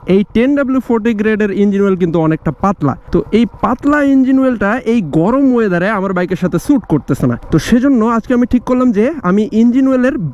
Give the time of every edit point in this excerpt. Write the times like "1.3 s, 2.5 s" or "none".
3.0 s, 7.4 s